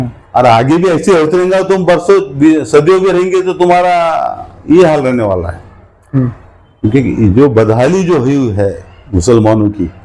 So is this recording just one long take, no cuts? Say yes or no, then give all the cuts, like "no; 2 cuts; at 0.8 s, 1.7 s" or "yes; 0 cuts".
yes; 0 cuts